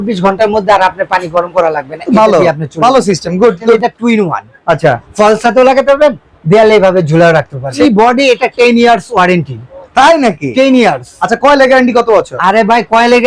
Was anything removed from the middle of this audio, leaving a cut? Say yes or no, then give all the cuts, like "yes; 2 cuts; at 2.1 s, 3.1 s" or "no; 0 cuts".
yes; 2 cuts; at 3.8 s, 7.8 s